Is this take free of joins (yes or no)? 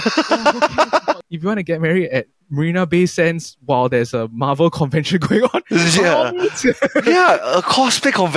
no